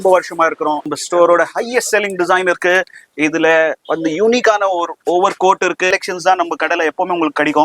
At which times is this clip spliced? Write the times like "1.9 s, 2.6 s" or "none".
0.9 s, 5.9 s